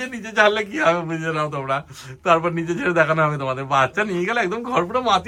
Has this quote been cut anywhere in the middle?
no; 0 cuts

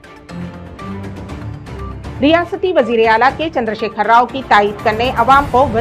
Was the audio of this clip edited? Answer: yes; 1 cut; at 2.0 s

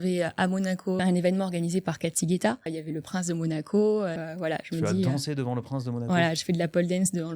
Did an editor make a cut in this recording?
yes; 3 cuts; at 1.0 s, 2.8 s, 4.2 s

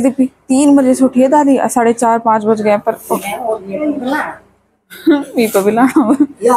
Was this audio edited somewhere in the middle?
no; 0 cuts

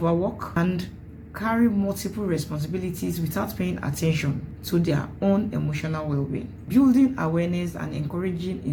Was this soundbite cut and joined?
no; 0 cuts

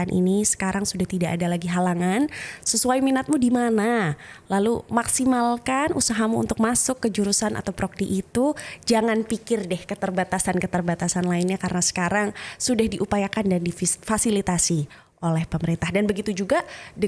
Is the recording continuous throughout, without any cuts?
yes; 0 cuts

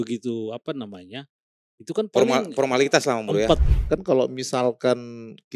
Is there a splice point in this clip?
yes; 1 cut; at 3.6 s

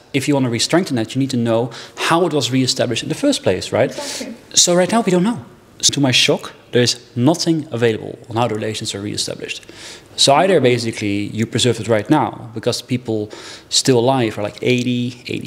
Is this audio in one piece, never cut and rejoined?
no; 1 cut; at 5.7 s

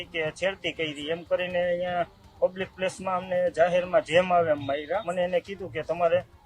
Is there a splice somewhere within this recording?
yes; 1 cut; at 5.1 s

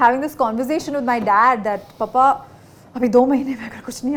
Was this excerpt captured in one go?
yes; 0 cuts

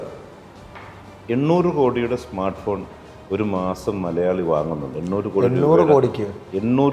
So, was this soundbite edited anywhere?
no; 0 cuts

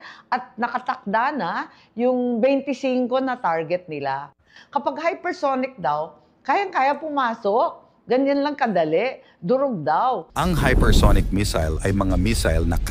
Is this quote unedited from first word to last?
yes; 0 cuts

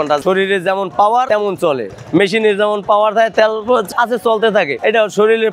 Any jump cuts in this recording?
no; 0 cuts

